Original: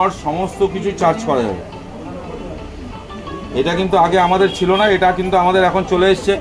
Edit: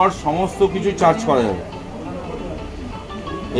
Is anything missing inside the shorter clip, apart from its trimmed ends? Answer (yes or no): no